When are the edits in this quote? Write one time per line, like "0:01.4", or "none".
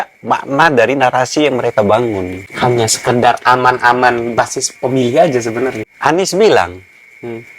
0:02.4
0:05.8